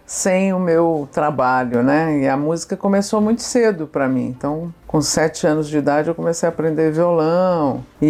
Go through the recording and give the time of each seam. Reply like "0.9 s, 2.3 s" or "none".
none